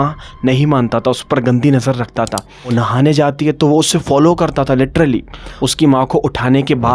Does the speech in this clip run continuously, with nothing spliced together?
no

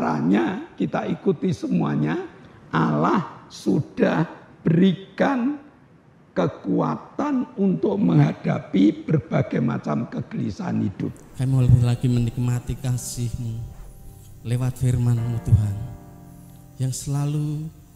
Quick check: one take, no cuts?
no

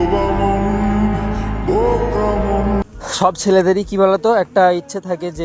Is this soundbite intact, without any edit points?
no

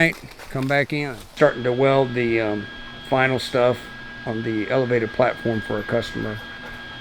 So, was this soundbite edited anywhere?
yes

